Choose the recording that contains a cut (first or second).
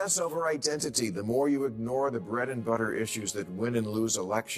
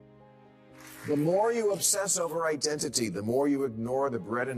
second